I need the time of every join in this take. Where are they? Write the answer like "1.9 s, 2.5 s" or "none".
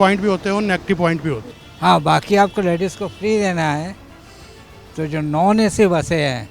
1.5 s